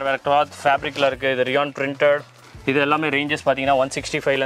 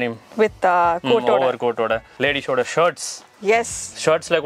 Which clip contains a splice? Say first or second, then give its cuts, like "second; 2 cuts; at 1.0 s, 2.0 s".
second; 1 cut; at 2.1 s